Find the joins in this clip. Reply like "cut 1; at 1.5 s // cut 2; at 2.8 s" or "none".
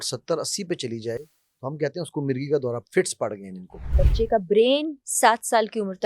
cut 1; at 3.9 s